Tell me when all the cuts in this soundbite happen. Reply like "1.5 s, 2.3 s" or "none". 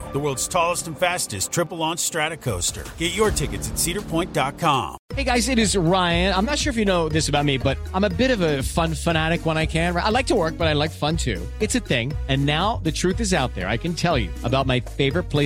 5.0 s